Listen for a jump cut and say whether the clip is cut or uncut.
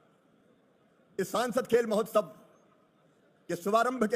uncut